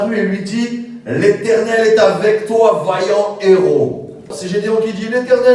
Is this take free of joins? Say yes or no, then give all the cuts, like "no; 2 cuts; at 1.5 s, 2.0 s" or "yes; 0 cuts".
no; 1 cut; at 4.4 s